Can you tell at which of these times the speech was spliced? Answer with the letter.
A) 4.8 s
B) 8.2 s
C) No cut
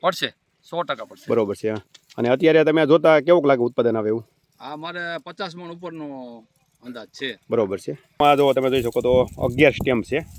B